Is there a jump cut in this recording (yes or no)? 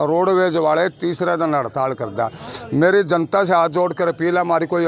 no